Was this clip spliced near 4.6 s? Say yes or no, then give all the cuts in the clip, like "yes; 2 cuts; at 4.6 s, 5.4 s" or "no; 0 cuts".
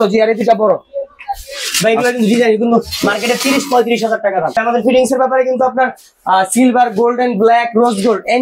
yes; 1 cut; at 4.6 s